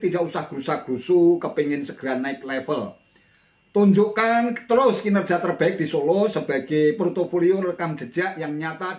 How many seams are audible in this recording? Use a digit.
0